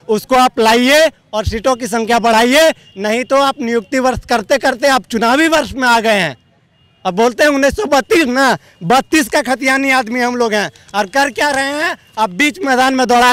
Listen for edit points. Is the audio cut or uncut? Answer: uncut